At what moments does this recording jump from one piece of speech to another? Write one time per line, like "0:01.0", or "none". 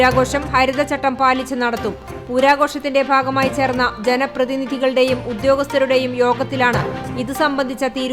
none